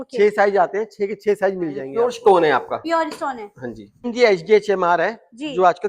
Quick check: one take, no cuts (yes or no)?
no